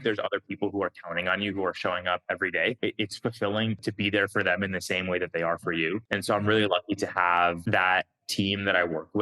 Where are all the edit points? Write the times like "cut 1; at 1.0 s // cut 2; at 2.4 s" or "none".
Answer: cut 1; at 2.8 s // cut 2; at 3.8 s // cut 3; at 6.1 s // cut 4; at 7.6 s

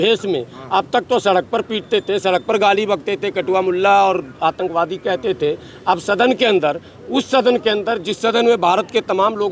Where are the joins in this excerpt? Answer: none

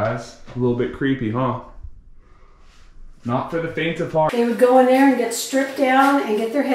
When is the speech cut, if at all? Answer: cut 1; at 4.3 s

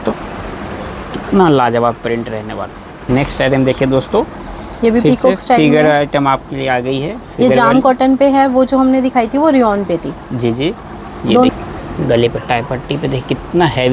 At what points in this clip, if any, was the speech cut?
cut 1; at 3.0 s // cut 2; at 11.5 s

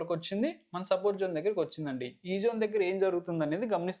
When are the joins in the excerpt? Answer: none

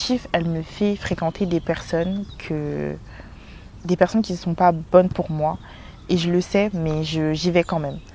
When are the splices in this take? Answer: none

